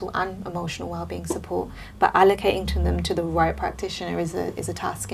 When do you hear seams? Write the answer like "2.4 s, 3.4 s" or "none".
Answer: none